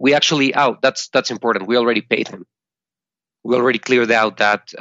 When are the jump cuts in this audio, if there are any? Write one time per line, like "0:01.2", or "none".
none